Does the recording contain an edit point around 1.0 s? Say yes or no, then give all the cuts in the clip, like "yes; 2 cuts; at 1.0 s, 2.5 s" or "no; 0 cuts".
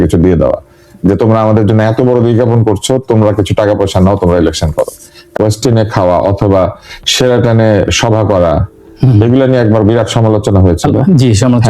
no; 1 cut; at 5.3 s